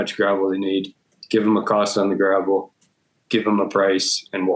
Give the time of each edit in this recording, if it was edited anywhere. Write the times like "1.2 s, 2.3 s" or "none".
none